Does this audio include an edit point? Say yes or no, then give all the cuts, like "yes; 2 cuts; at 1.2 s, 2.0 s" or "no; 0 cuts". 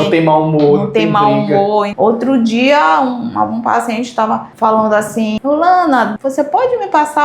yes; 3 cuts; at 1.9 s, 5.4 s, 6.2 s